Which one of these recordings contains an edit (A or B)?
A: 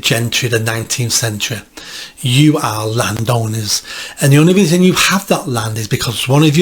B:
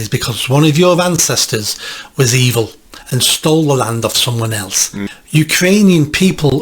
B